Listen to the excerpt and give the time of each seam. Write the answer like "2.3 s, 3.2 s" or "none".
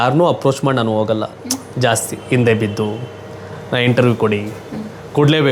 none